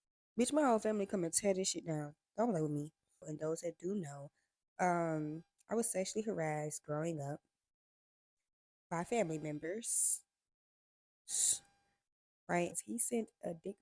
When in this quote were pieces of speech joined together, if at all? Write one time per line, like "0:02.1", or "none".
0:03.3
0:12.7